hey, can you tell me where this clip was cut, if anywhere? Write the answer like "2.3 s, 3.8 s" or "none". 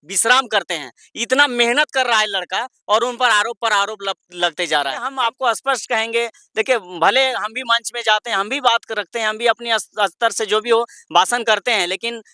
5.1 s